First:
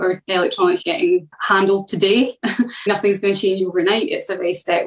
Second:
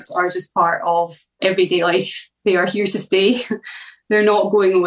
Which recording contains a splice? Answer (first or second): first